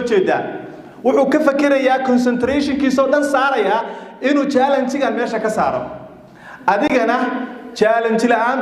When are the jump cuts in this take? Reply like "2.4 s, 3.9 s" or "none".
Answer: none